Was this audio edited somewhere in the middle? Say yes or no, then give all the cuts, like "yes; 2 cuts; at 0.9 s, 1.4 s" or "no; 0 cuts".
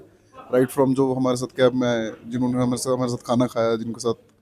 no; 0 cuts